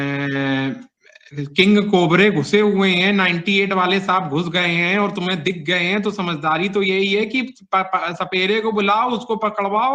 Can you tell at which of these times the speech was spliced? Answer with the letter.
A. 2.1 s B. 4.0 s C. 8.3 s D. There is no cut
D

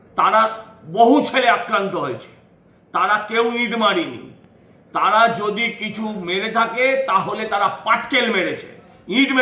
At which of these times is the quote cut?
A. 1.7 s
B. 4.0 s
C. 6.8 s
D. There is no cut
D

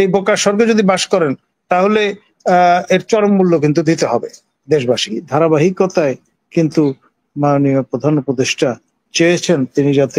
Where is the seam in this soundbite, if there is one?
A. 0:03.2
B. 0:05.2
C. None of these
B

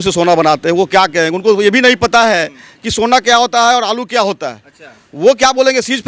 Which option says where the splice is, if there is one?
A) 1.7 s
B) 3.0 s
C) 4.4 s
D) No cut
D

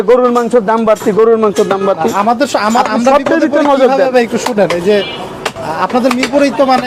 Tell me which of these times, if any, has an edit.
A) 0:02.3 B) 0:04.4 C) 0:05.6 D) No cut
D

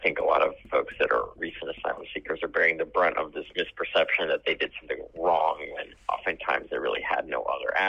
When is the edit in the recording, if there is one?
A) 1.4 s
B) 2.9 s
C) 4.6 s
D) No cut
A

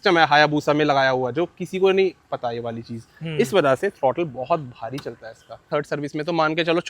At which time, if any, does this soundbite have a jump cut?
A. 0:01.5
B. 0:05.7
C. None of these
B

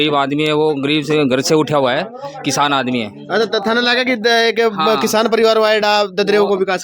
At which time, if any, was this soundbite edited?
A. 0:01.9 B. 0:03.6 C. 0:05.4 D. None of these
D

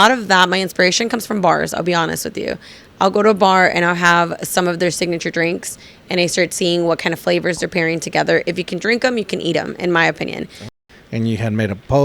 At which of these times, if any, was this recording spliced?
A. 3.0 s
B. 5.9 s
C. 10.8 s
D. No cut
C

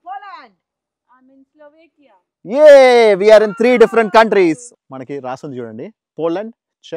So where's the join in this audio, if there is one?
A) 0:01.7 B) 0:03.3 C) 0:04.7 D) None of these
C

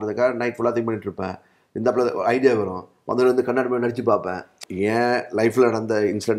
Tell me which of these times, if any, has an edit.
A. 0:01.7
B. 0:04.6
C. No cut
B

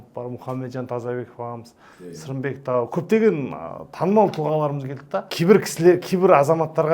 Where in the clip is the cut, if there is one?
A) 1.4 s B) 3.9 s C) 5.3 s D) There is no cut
C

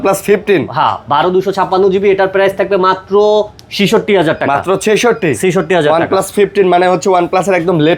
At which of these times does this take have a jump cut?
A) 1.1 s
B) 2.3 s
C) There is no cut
C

